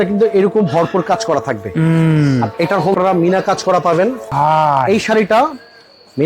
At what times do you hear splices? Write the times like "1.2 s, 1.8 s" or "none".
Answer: 2.9 s, 4.2 s